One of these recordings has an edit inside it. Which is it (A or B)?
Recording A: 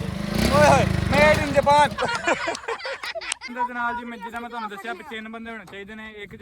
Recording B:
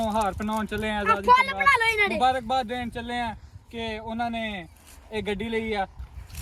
A